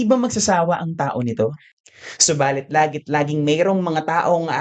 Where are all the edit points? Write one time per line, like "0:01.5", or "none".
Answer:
0:01.7